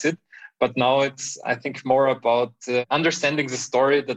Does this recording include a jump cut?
yes; 1 cut; at 2.8 s

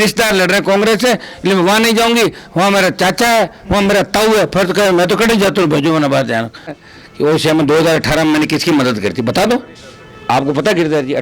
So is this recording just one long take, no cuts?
no; 1 cut; at 6.8 s

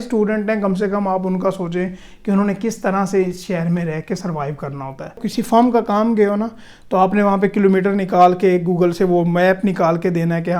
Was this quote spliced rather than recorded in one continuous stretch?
yes; 1 cut; at 5.3 s

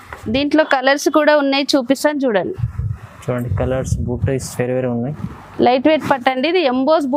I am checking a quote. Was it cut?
no; 0 cuts

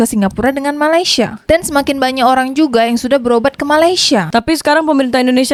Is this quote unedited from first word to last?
yes; 0 cuts

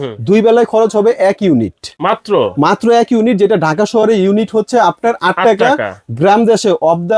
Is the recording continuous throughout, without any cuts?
yes; 0 cuts

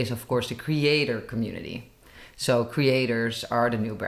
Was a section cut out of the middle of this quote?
no; 0 cuts

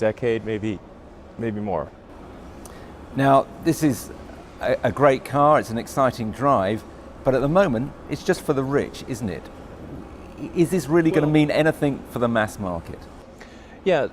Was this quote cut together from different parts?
yes; 1 cut; at 3.5 s

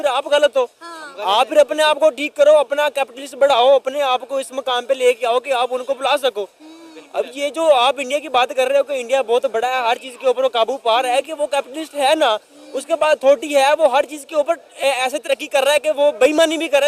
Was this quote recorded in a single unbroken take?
yes; 0 cuts

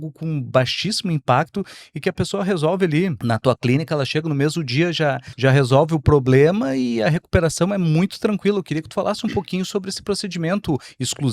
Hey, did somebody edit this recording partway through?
yes; 2 cuts; at 3.2 s, 5.3 s

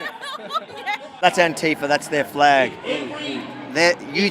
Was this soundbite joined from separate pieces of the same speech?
yes; 1 cut; at 1.2 s

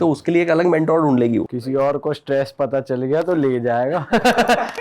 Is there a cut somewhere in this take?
yes; 1 cut; at 1.5 s

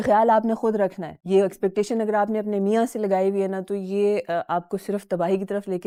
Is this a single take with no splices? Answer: yes; 0 cuts

